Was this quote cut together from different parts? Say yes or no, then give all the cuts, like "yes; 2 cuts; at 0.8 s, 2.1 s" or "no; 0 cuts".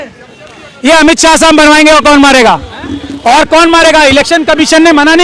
no; 0 cuts